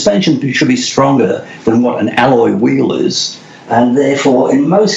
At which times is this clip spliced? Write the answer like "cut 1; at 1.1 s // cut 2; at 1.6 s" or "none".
none